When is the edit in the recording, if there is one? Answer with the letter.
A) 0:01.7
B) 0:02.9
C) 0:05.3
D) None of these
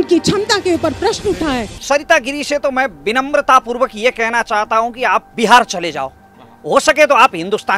A